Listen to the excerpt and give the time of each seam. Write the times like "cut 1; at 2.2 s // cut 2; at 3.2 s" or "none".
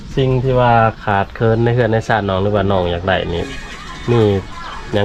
none